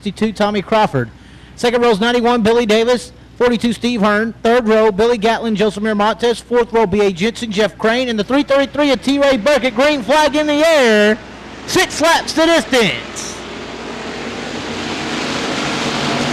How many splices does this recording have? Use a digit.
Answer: 0